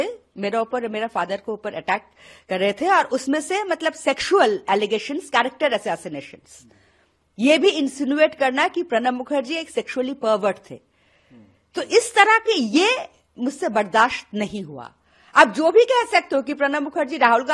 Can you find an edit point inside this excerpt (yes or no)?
no